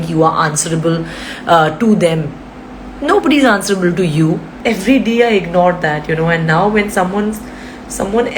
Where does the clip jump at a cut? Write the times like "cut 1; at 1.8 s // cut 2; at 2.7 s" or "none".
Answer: cut 1; at 4.5 s